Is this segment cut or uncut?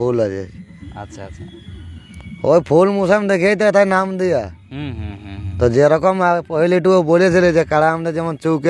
uncut